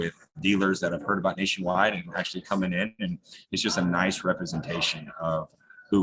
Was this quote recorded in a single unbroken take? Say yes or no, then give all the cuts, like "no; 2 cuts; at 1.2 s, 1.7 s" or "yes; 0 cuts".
yes; 0 cuts